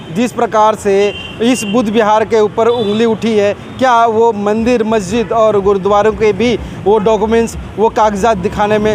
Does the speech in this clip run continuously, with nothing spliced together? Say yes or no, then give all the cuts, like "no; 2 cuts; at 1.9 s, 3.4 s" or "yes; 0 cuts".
yes; 0 cuts